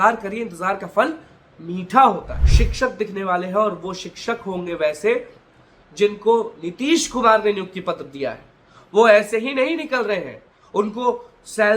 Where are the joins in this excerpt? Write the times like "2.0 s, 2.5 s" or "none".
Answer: 2.4 s